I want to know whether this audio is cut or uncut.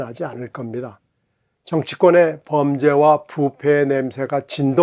uncut